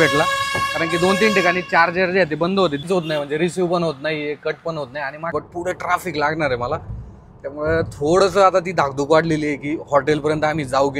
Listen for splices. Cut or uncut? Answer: cut